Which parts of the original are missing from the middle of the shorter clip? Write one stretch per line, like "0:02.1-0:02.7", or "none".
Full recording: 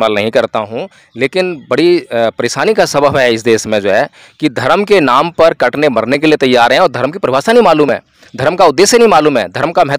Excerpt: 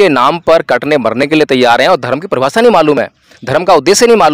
none